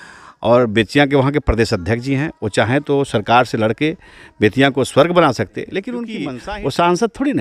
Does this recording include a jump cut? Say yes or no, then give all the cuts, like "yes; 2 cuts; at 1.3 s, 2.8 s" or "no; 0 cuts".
yes; 1 cut; at 6.2 s